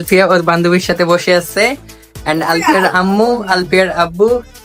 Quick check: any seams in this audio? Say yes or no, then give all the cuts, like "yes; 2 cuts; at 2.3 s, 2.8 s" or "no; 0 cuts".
no; 0 cuts